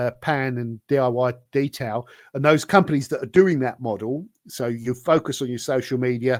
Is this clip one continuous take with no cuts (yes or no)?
yes